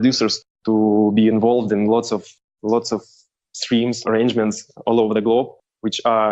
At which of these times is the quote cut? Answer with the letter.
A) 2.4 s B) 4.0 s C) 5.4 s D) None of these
B